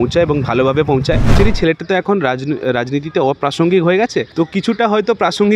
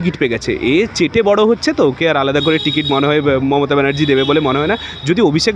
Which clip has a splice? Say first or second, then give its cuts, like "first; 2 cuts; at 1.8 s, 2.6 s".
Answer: first; 2 cuts; at 1.3 s, 4.3 s